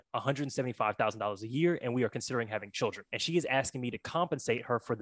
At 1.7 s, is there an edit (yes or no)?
no